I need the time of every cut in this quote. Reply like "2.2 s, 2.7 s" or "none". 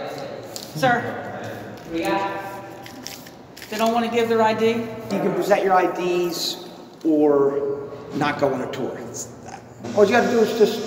5.1 s, 9.9 s